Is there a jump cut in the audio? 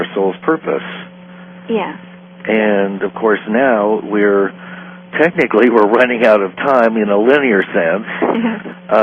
yes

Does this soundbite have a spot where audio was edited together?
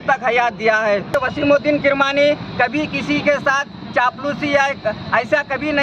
yes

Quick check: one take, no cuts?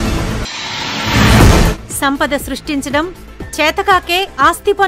yes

